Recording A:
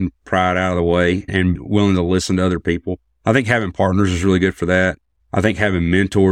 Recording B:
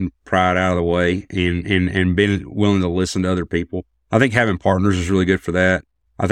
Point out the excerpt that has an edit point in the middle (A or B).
A